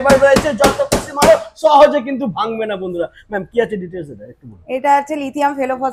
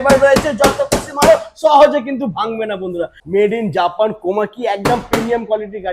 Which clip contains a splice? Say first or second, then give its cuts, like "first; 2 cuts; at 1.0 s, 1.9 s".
second; 1 cut; at 3.2 s